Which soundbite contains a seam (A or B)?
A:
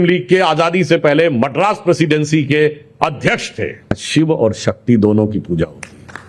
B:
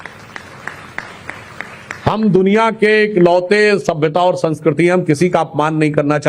A